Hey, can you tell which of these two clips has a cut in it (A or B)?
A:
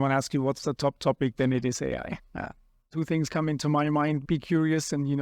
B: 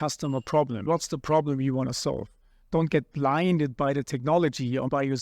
A